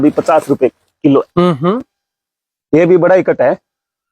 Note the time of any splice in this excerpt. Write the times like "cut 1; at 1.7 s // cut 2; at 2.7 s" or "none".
cut 1; at 1.3 s